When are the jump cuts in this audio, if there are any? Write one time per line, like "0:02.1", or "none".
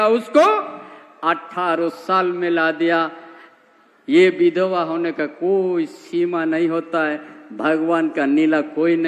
none